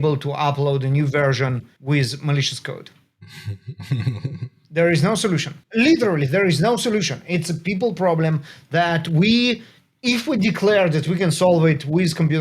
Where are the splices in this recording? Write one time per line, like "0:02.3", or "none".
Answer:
0:01.7
0:05.6